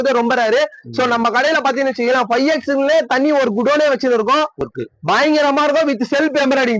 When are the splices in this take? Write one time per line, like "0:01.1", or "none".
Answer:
0:04.6